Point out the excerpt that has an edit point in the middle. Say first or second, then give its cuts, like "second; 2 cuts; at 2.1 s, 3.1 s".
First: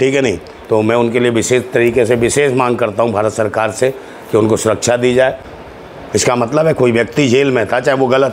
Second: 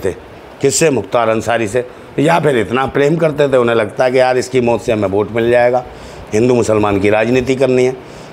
first; 1 cut; at 5.5 s